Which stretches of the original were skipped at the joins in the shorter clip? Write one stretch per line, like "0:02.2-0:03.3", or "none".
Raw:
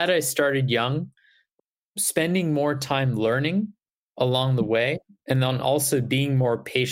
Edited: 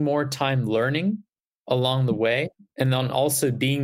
none